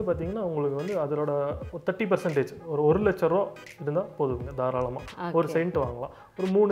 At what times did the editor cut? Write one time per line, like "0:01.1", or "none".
none